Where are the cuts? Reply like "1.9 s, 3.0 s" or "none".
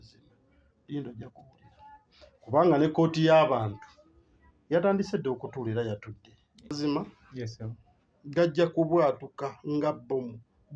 6.8 s